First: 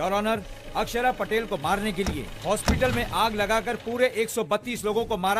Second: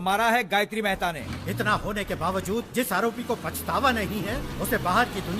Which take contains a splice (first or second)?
second